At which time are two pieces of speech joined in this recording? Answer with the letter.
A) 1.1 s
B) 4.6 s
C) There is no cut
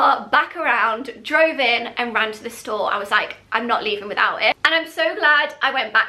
B